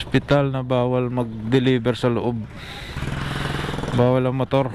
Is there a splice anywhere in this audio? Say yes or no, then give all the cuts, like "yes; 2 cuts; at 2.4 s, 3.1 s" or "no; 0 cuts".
no; 0 cuts